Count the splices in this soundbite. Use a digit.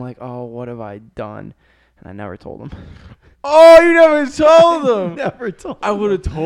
0